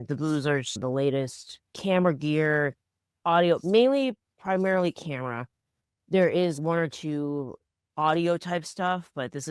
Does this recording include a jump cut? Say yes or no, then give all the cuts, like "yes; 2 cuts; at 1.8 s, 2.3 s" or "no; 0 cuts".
no; 0 cuts